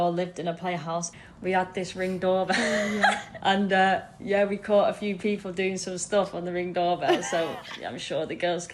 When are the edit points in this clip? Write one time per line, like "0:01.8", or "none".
0:01.1
0:03.3